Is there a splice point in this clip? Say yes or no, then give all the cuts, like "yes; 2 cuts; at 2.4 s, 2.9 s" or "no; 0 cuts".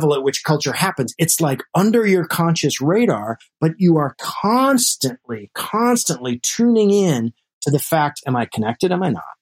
no; 0 cuts